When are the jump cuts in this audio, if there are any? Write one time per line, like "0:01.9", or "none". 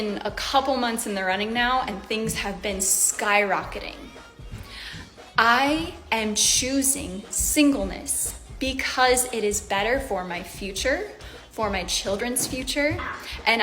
0:01.2